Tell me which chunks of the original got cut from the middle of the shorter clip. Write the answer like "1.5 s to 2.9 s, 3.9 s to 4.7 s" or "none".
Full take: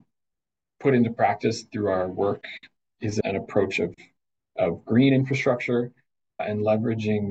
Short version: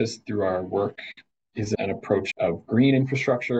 3.7 s to 4.5 s